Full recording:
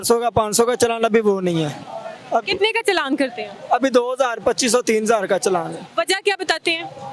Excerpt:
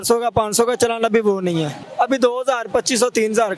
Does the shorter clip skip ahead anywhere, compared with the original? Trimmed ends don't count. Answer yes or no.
yes